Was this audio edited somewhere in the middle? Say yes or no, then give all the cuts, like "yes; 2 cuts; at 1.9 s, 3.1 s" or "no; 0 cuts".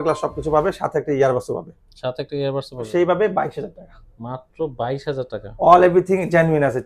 yes; 1 cut; at 2.9 s